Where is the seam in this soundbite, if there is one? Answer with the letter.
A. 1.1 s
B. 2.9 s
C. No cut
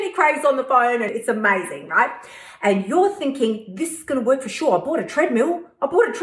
A